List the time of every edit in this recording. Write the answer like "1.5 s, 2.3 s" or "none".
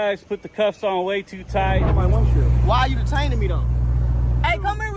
1.9 s